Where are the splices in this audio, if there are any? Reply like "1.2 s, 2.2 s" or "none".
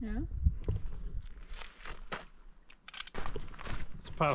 3.2 s